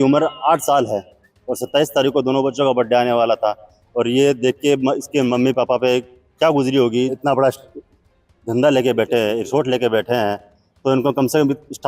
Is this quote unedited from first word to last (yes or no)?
no